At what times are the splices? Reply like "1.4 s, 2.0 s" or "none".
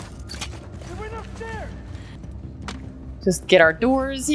2.2 s